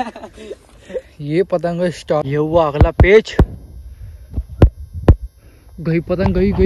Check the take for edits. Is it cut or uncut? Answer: cut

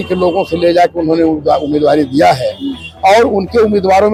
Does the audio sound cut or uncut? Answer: uncut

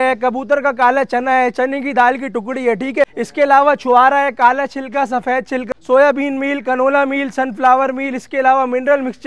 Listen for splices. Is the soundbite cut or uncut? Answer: cut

